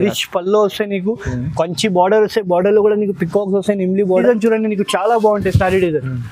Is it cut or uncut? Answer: cut